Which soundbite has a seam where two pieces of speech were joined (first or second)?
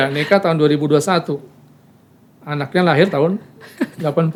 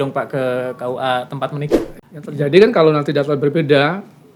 second